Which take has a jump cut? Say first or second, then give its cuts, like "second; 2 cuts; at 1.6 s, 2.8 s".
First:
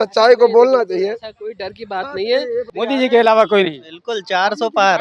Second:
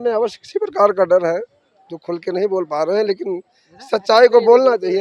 first; 1 cut; at 2.7 s